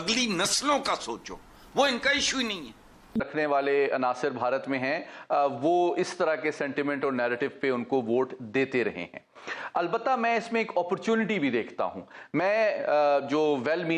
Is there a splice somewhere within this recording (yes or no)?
no